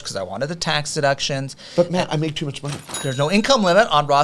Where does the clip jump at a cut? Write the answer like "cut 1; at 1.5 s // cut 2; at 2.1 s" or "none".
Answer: cut 1; at 2.9 s